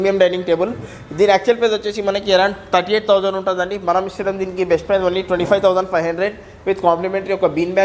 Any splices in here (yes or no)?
no